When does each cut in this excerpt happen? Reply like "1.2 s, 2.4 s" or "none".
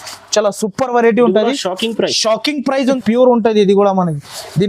2.8 s